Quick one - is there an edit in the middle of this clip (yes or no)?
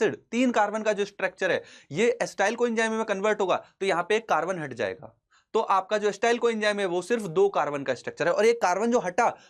no